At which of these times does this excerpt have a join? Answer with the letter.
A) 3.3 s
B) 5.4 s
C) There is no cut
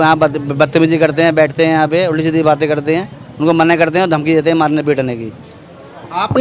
C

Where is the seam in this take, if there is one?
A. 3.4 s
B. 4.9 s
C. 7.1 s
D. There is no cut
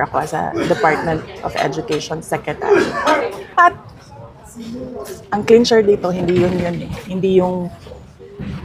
D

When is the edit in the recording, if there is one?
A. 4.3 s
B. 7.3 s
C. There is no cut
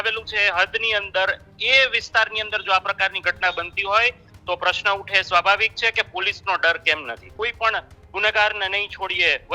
B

